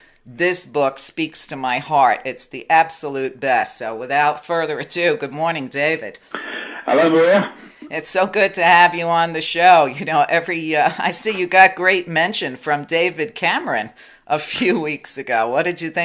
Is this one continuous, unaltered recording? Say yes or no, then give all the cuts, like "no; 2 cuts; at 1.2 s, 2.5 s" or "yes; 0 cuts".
no; 1 cut; at 5.8 s